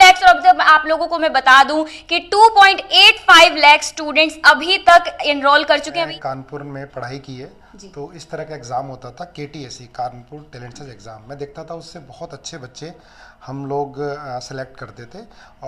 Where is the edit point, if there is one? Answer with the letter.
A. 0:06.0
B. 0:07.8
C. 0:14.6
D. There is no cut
A